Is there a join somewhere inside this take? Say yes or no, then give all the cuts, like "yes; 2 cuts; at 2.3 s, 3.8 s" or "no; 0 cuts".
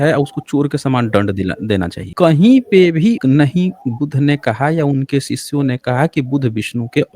yes; 3 cuts; at 2.0 s, 3.2 s, 5.8 s